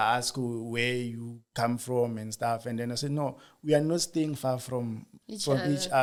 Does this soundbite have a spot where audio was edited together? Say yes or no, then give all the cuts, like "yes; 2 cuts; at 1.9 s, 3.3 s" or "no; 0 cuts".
no; 0 cuts